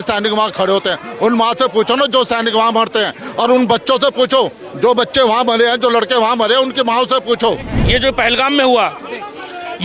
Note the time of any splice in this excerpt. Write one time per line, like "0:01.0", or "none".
0:07.8